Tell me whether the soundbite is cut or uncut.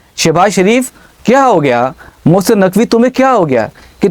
uncut